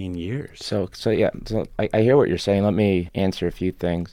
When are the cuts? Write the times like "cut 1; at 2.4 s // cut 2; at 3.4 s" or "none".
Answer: cut 1; at 3.1 s